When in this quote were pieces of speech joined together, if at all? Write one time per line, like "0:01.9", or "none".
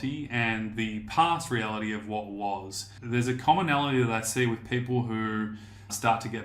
0:02.9